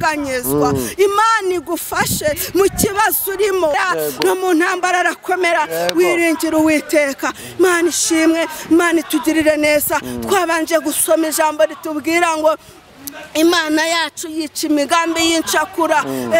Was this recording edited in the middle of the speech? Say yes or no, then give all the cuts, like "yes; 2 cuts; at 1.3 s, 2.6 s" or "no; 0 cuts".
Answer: yes; 1 cut; at 3.7 s